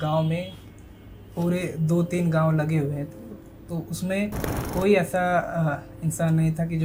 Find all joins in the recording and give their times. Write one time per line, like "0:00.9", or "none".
none